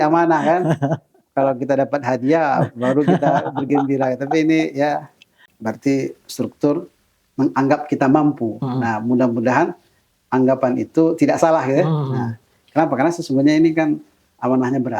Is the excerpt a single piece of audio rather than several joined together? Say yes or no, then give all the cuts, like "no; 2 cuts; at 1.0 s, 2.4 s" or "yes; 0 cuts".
no; 1 cut; at 5.5 s